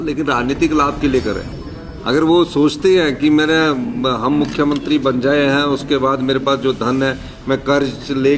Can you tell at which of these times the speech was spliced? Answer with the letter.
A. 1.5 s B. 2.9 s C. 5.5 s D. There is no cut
A